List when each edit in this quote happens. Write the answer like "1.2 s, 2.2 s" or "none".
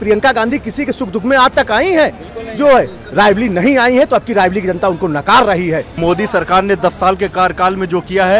5.9 s